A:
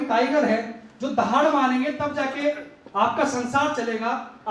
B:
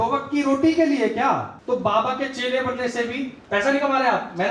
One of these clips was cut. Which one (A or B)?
B